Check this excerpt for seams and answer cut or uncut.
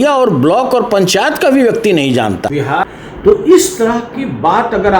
cut